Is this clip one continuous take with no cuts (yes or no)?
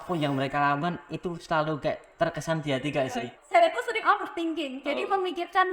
no